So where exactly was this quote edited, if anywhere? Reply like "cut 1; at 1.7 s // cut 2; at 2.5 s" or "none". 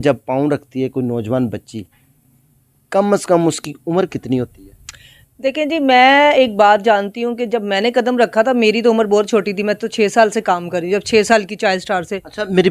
none